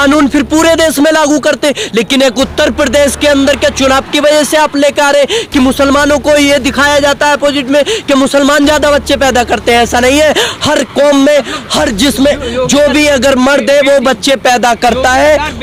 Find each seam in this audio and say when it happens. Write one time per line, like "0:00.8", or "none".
none